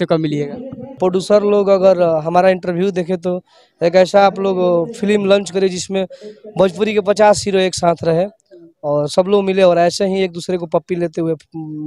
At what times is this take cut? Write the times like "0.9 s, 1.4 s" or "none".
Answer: 0.9 s

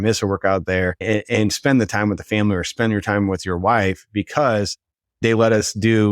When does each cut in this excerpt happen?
1.0 s, 5.2 s

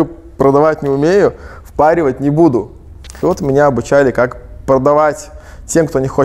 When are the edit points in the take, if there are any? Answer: 3.1 s

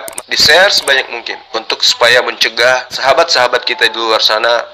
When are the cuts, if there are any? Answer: 2.9 s

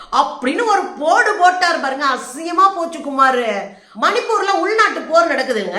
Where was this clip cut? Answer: 3.8 s

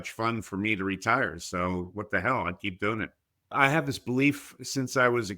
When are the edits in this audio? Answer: 3.5 s

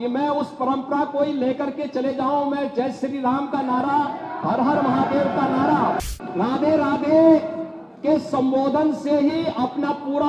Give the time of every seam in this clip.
6.0 s

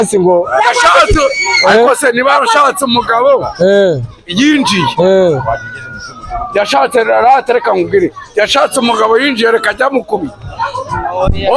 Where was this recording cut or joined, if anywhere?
none

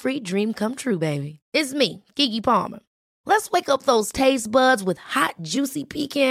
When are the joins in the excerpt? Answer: none

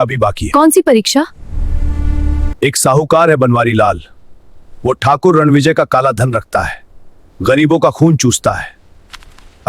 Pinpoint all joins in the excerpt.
2.5 s

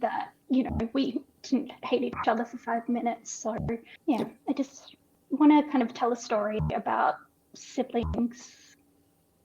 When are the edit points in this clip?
3.9 s

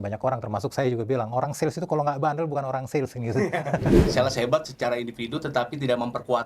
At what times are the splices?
4.0 s

